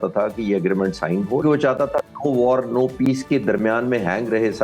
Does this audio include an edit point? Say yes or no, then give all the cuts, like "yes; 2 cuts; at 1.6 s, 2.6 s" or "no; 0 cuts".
yes; 1 cut; at 1.4 s